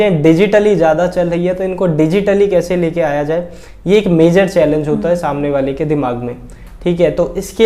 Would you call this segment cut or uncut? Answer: uncut